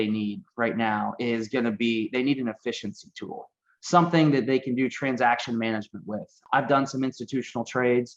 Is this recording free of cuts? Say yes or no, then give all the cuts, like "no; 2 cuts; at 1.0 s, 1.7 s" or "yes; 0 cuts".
no; 1 cut; at 6.4 s